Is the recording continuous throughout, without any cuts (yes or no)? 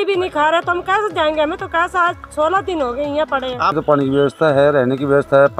no